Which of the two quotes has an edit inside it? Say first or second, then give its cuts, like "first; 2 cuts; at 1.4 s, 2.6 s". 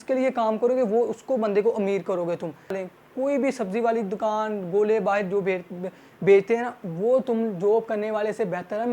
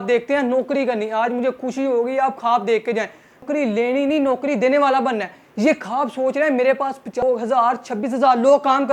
first; 1 cut; at 2.8 s